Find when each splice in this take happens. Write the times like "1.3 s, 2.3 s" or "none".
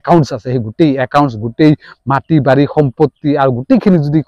none